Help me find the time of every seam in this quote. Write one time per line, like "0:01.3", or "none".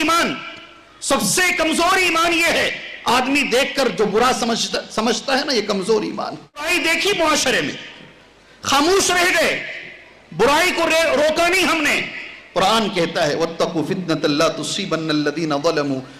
0:06.7